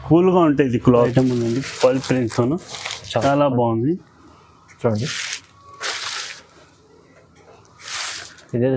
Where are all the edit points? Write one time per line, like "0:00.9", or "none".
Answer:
0:01.1